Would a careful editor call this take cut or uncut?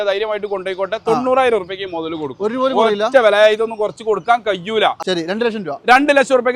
cut